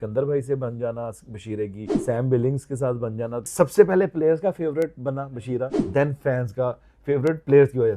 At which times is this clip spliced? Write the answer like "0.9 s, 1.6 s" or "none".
1.9 s, 3.5 s, 5.8 s